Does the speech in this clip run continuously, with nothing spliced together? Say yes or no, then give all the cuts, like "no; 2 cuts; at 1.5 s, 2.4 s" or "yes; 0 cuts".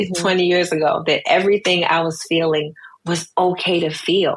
yes; 0 cuts